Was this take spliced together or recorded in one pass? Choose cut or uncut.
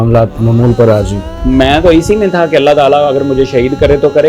cut